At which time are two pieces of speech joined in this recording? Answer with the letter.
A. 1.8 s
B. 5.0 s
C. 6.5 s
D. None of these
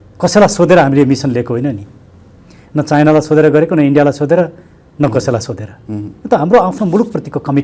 D